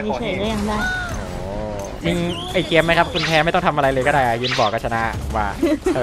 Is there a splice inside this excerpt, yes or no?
yes